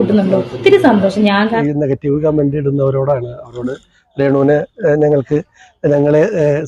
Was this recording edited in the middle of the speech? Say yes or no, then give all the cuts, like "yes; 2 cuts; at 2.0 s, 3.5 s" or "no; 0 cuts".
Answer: yes; 1 cut; at 1.6 s